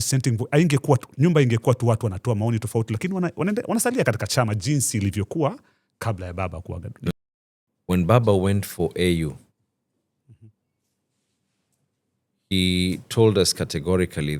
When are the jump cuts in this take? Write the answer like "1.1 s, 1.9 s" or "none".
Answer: 7.1 s